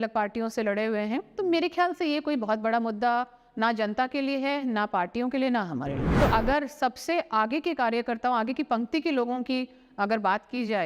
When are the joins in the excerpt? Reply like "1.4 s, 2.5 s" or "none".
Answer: 6.0 s